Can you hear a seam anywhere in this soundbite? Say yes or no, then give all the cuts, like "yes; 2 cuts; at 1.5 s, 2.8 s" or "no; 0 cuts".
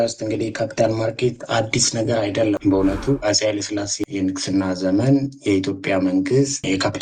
yes; 1 cut; at 3.2 s